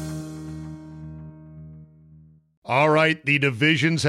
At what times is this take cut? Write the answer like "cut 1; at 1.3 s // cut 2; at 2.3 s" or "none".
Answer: cut 1; at 2.4 s